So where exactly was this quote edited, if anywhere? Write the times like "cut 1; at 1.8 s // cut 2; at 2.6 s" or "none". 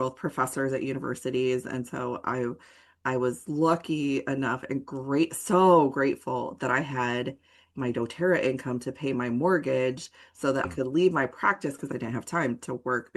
cut 1; at 10.7 s // cut 2; at 11.9 s